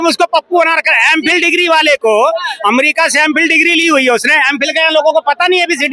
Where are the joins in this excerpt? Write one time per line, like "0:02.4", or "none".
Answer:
none

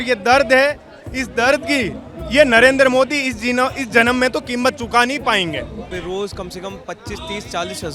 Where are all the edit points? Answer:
0:05.9

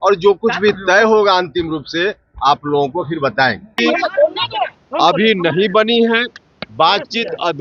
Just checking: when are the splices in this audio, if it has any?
0:03.8

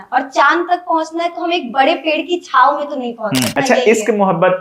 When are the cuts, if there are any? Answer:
0:03.6

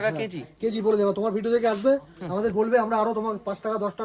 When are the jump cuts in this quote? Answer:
none

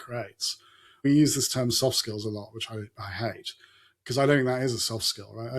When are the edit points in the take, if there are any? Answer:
0:01.0

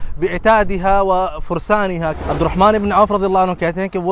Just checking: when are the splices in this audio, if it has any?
0:02.2

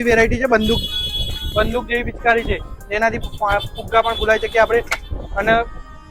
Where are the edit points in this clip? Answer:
none

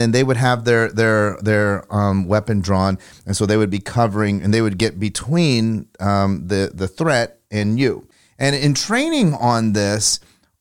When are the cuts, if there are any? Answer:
0:08.1

